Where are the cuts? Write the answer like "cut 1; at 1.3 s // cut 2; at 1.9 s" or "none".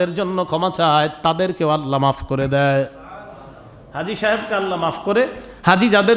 none